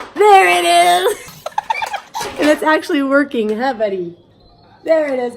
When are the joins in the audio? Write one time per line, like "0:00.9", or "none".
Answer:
0:01.8